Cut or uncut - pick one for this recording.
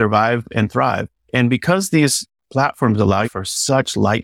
cut